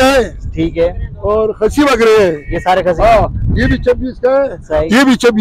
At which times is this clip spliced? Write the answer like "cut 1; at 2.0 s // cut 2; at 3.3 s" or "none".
none